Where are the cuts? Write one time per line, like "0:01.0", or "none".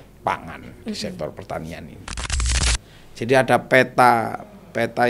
0:02.5